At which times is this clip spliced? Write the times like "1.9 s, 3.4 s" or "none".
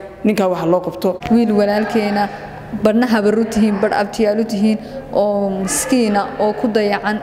1.2 s